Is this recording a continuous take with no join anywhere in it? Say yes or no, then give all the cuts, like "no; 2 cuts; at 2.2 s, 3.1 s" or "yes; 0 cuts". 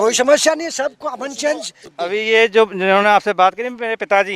no; 1 cut; at 1.8 s